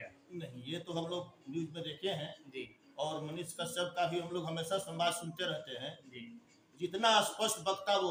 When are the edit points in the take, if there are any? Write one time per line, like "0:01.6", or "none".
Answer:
none